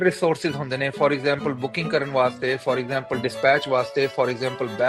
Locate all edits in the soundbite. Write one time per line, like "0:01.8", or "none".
none